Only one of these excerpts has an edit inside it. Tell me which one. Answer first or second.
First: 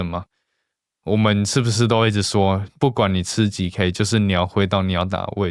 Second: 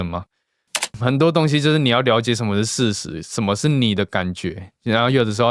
second